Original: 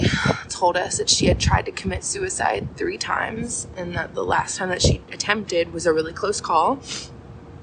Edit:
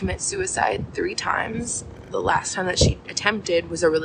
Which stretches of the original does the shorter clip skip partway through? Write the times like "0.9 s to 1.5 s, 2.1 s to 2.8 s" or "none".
3.8 s to 4.0 s

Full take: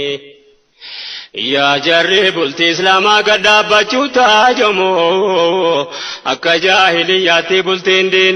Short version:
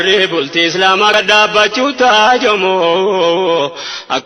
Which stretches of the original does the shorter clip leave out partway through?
3.2 s to 3.3 s

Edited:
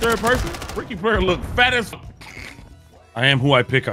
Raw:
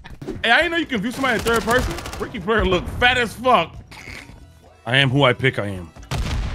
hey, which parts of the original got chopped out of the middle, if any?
3.4 s to 3.7 s

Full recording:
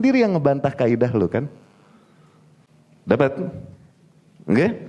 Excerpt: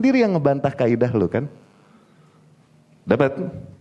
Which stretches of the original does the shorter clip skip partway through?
none

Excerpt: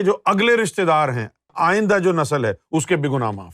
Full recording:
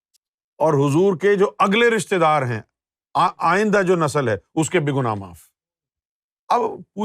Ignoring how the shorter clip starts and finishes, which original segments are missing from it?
2.9 s to 3.4 s

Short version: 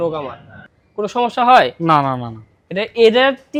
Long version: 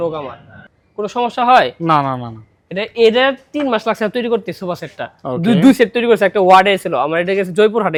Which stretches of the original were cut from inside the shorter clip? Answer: none

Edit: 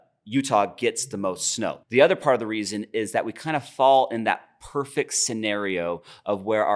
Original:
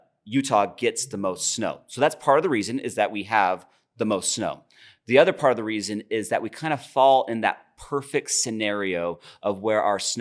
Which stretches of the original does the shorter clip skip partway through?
1.8 s to 5.0 s

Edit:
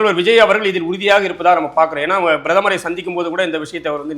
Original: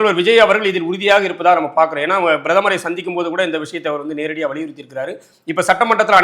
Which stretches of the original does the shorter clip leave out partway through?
none

